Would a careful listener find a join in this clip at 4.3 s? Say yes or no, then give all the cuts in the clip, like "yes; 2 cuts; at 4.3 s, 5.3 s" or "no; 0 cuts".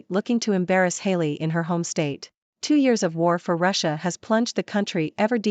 no; 1 cut; at 2.6 s